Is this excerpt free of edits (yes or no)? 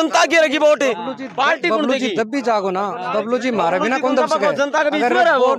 yes